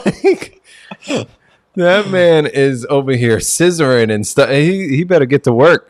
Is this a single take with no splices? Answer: yes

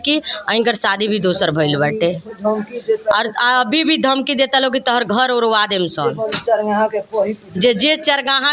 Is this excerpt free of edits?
yes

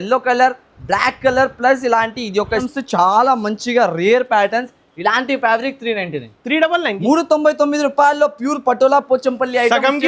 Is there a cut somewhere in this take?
yes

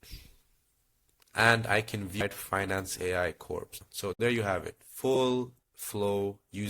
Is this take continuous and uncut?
no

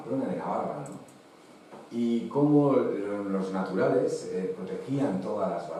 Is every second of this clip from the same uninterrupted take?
yes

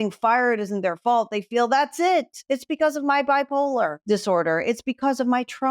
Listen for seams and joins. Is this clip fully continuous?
no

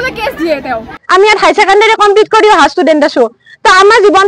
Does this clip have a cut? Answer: yes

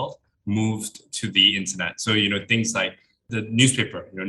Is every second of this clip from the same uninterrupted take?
no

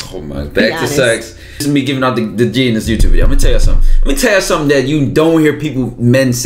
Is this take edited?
yes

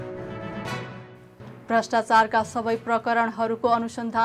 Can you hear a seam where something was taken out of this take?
no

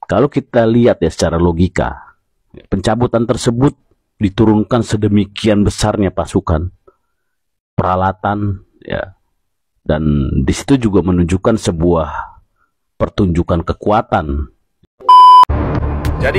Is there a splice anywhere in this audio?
yes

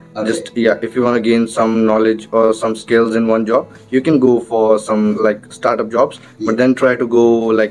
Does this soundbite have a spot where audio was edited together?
no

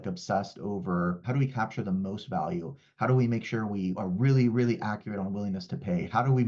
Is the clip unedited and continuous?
no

